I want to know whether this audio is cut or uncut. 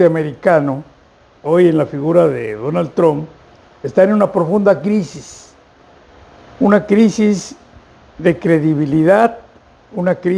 uncut